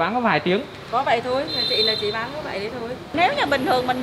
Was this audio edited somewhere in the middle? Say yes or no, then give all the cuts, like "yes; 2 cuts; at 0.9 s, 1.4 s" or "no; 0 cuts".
yes; 1 cut; at 3.1 s